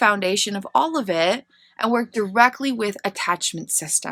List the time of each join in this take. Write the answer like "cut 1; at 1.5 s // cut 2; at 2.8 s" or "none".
none